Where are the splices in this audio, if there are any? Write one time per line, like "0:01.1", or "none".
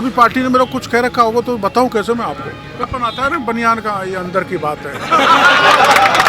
0:02.9